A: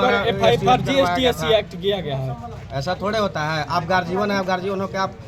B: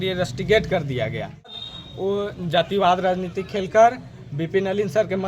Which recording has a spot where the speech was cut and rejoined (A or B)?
B